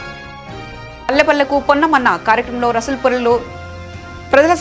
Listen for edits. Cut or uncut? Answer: cut